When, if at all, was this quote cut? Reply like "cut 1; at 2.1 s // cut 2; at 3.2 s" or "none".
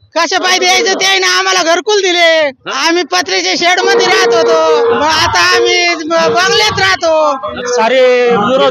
cut 1; at 2.6 s // cut 2; at 5.0 s // cut 3; at 7.5 s